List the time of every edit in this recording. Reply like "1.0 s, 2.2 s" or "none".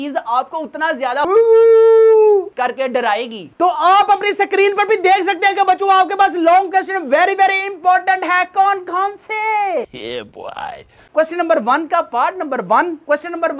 none